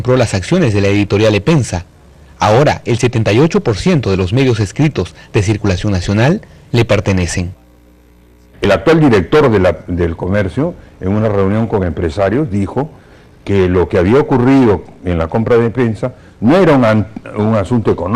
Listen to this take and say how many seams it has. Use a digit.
1